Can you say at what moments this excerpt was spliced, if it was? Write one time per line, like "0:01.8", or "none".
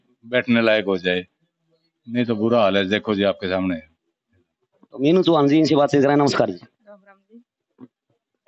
none